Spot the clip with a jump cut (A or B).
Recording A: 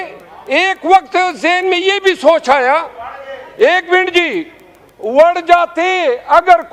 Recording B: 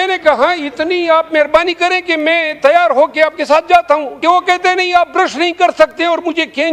B